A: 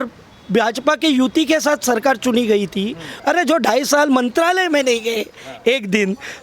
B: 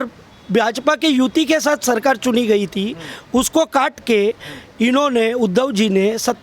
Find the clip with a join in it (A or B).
A